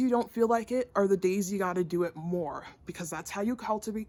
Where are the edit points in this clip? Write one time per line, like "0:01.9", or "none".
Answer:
none